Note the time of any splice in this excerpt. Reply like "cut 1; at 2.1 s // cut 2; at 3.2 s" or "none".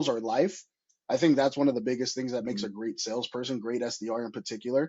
none